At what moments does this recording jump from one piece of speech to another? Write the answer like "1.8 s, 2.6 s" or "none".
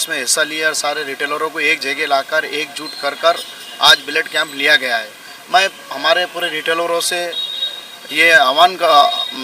none